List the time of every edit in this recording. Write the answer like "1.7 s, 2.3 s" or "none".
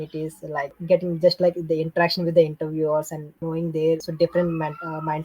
0.8 s, 3.3 s, 4.1 s